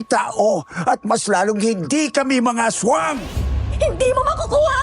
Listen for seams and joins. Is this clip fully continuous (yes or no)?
no